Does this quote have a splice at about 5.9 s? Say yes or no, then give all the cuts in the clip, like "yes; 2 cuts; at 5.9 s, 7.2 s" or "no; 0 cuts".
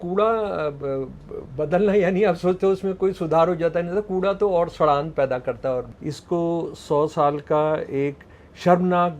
yes; 1 cut; at 5.9 s